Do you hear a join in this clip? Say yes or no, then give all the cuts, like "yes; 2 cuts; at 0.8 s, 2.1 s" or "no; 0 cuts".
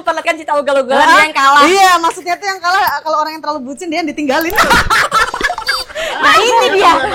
no; 0 cuts